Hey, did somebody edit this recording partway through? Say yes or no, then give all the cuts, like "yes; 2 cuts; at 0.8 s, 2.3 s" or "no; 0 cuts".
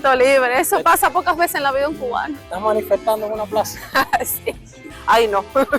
no; 0 cuts